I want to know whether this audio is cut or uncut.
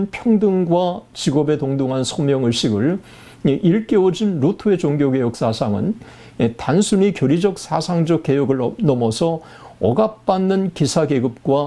uncut